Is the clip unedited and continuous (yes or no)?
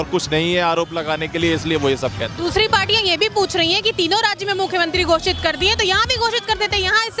yes